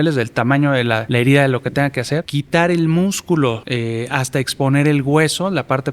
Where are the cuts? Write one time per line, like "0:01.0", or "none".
0:01.0
0:02.3
0:03.6